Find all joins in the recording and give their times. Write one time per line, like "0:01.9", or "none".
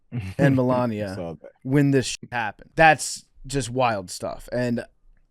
0:02.1